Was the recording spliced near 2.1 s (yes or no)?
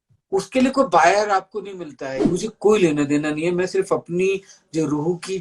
yes